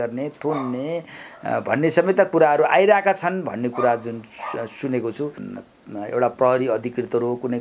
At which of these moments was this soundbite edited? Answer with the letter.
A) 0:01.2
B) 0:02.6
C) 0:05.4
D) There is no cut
C